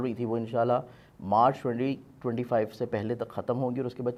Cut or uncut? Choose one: uncut